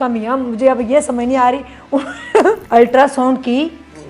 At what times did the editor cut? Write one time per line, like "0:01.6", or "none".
0:02.6